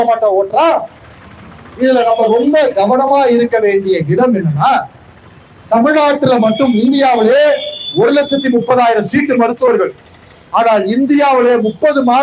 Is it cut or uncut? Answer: uncut